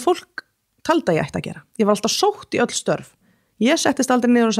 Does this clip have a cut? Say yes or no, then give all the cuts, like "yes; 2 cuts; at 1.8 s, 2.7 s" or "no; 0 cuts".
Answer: no; 0 cuts